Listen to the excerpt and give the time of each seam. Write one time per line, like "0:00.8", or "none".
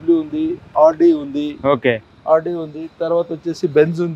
none